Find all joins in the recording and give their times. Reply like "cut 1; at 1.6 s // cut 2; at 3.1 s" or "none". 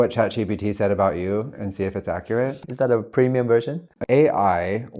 cut 1; at 2.6 s // cut 2; at 3.8 s